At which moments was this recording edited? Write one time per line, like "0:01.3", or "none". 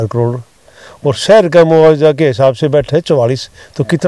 none